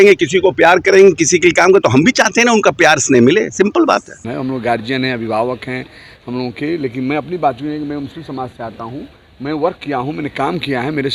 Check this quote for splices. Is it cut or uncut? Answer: cut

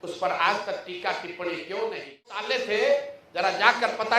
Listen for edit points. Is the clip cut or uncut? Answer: cut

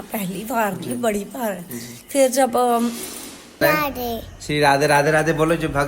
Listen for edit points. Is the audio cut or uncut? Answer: cut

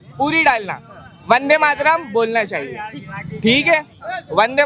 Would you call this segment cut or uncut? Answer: uncut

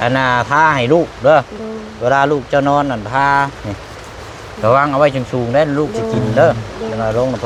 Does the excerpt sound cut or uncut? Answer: uncut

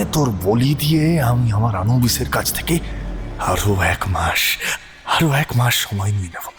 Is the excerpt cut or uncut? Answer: uncut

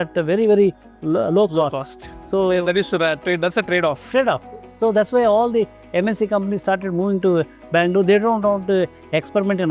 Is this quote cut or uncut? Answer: uncut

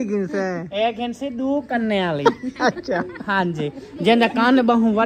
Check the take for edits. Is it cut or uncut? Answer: uncut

